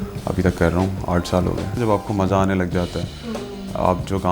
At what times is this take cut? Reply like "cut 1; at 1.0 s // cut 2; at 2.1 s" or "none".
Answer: cut 1; at 1.8 s

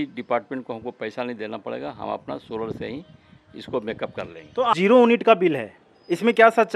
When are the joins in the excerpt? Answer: cut 1; at 4.7 s

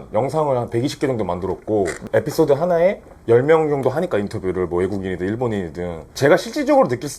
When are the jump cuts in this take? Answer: cut 1; at 6.0 s

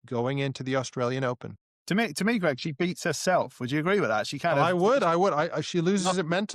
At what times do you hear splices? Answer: none

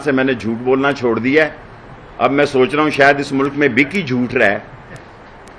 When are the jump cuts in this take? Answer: none

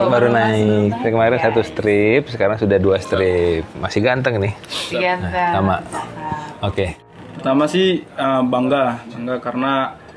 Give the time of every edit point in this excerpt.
cut 1; at 7.0 s

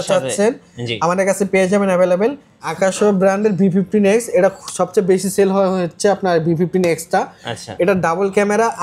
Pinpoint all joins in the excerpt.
cut 1; at 2.6 s

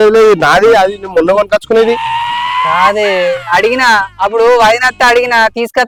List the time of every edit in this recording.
none

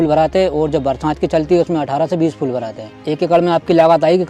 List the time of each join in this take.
cut 1; at 2.9 s

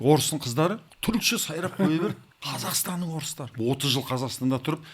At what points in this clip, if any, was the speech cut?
cut 1; at 0.9 s // cut 2; at 2.3 s // cut 3; at 3.5 s

